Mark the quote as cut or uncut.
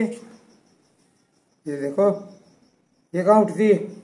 uncut